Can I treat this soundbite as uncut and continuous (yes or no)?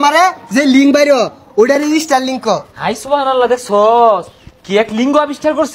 yes